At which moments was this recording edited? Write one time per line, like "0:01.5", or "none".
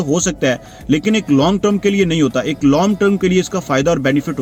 none